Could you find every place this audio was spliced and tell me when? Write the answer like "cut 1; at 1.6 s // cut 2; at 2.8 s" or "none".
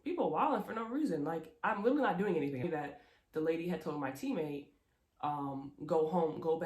cut 1; at 2.6 s

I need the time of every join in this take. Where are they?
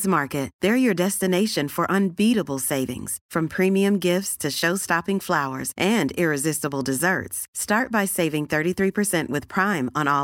none

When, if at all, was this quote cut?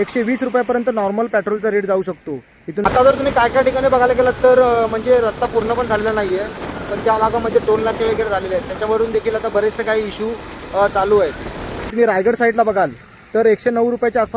cut 1; at 2.9 s // cut 2; at 11.9 s

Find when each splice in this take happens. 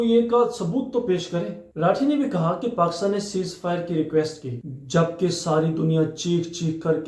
none

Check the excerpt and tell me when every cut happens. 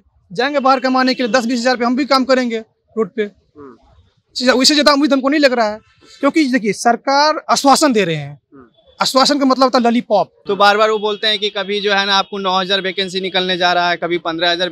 cut 1; at 10.4 s

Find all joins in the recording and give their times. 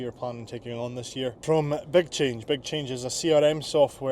cut 1; at 1.4 s

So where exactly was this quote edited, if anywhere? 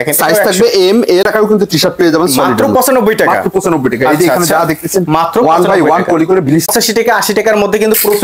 cut 1; at 1.2 s // cut 2; at 6.7 s

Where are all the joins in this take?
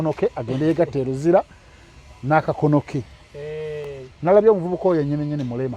none

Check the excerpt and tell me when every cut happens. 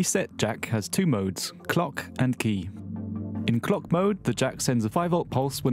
none

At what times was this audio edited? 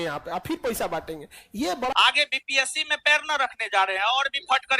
cut 1; at 1.9 s

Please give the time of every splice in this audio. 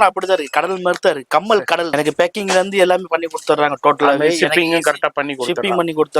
cut 1; at 1.9 s

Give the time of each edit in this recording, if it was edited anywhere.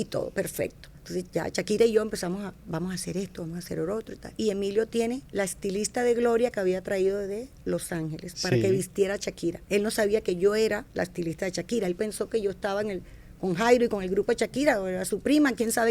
cut 1; at 4.3 s // cut 2; at 9.6 s

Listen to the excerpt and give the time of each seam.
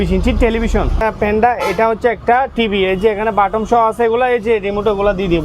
cut 1; at 1.0 s

